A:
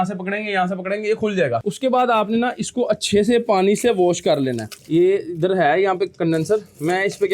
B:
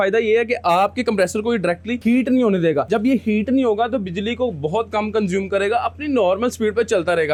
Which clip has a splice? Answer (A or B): A